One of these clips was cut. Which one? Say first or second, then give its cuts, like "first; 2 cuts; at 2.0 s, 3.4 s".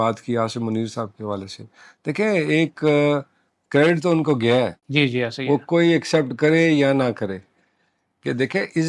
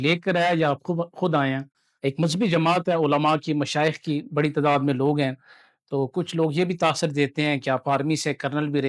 first; 1 cut; at 4.8 s